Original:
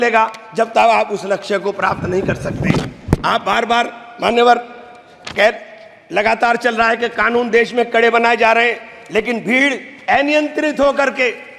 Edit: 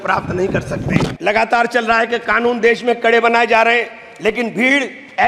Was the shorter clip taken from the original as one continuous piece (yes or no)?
no